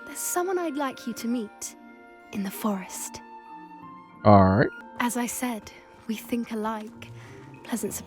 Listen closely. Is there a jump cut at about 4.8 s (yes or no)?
yes